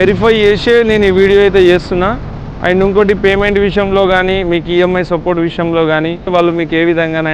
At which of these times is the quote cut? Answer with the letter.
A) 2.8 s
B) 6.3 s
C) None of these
B